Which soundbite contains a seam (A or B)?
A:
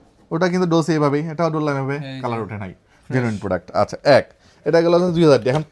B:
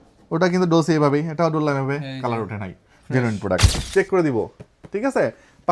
B